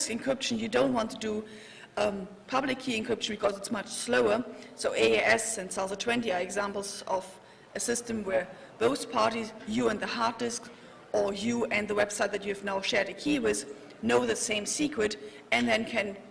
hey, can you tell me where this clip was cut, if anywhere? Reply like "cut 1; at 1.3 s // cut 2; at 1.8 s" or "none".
cut 1; at 7.0 s